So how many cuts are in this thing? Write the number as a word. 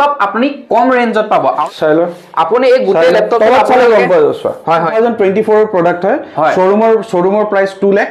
two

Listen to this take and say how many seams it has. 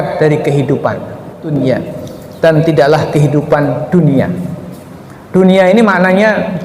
one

